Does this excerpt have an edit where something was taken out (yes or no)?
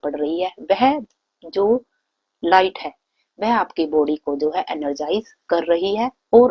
no